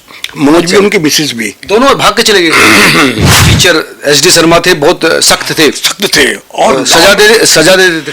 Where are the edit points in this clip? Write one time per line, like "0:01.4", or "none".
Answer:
0:03.4